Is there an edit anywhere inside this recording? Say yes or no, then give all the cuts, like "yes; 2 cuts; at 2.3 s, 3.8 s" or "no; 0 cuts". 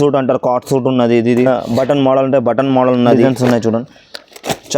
yes; 2 cuts; at 1.5 s, 3.2 s